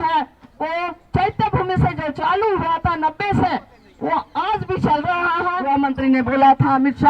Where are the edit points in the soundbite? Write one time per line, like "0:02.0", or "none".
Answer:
0:05.6